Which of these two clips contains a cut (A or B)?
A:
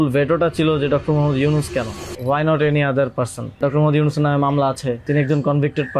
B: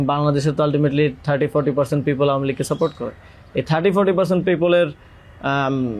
A